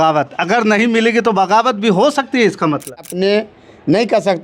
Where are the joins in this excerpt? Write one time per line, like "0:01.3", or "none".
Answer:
0:03.1